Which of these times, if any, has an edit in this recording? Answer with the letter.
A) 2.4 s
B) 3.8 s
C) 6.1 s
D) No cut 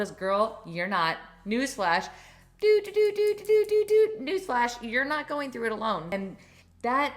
C